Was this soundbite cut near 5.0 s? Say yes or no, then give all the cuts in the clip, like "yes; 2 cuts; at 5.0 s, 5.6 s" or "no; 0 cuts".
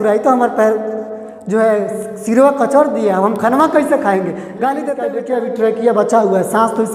yes; 1 cut; at 5.0 s